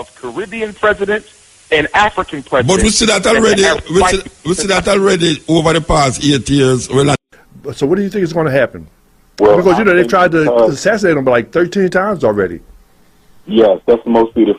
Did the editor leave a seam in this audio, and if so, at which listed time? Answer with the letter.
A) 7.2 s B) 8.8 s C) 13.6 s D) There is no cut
A